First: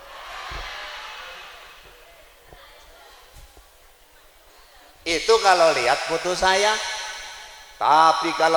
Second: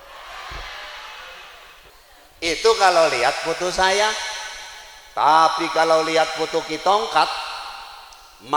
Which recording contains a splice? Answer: second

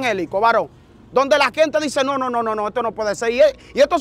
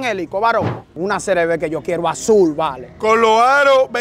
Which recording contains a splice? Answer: second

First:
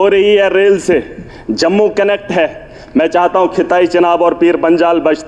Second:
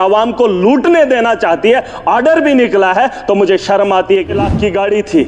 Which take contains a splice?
second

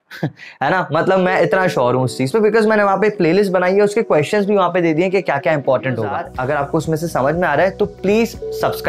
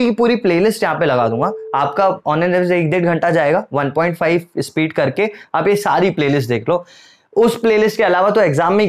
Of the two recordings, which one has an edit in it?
first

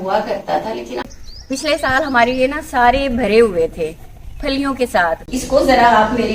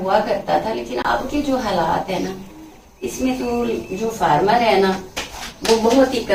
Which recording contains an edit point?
first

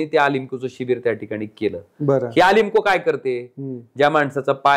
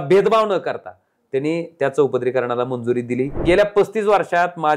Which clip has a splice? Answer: second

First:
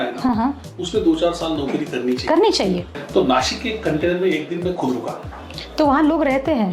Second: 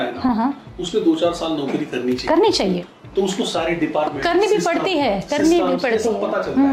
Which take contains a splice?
first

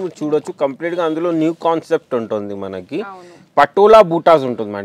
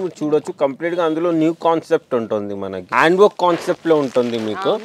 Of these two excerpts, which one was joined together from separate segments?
second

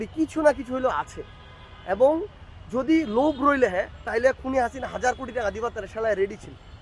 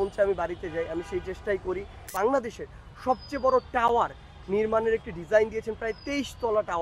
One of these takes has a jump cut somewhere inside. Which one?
second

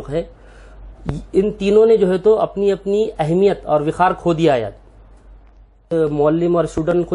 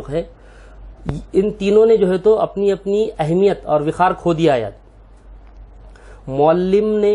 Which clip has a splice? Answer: first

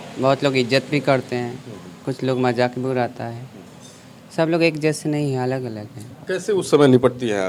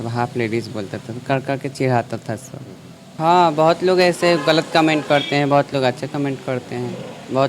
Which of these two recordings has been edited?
second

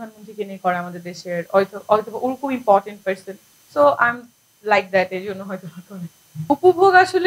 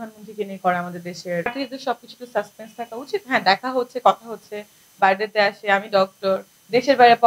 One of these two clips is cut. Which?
second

